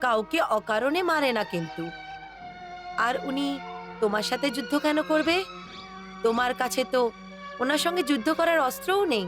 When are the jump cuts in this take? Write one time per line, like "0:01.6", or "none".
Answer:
none